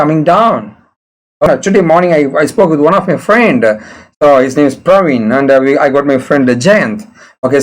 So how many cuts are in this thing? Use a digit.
1